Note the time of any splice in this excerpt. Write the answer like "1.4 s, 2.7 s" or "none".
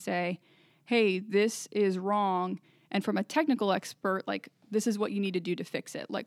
none

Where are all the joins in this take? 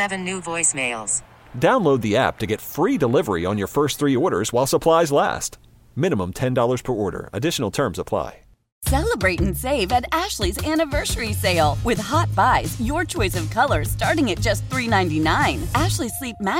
8.8 s

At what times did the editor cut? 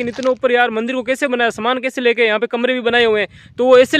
none

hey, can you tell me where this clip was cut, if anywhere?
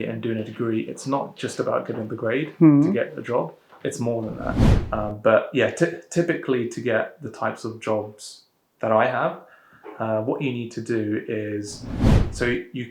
4.7 s

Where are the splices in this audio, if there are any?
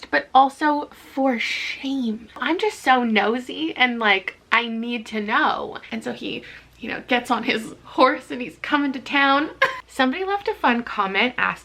2.4 s, 5.8 s, 9.8 s

